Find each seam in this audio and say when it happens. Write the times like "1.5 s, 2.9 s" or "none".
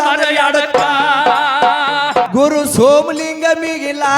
2.3 s